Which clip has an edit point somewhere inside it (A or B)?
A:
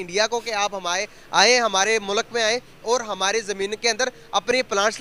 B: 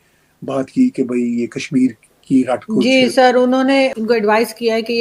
B